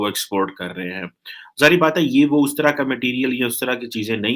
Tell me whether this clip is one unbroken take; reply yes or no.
yes